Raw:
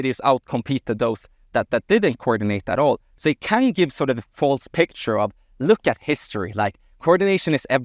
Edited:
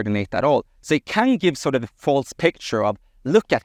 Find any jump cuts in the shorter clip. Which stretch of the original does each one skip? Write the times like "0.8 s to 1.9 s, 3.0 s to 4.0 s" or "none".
none